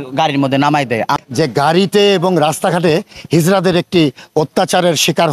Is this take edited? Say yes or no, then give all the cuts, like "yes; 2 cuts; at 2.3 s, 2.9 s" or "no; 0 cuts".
yes; 1 cut; at 1.2 s